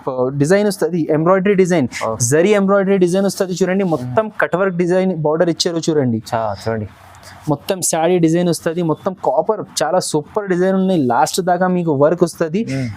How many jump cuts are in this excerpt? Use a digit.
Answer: 0